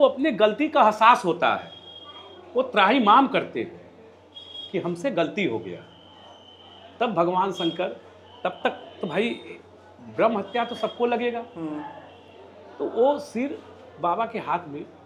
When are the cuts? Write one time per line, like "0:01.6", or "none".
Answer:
none